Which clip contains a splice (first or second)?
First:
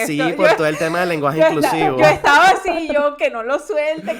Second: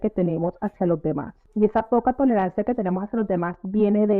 second